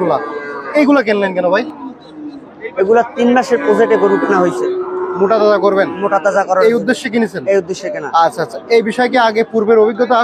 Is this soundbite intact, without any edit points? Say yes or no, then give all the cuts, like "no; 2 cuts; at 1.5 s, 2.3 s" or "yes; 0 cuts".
yes; 0 cuts